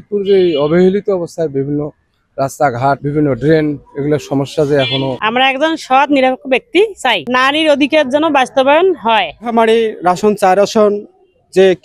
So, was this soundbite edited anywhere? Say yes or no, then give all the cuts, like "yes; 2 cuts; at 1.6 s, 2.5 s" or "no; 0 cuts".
yes; 3 cuts; at 3.0 s, 5.2 s, 7.2 s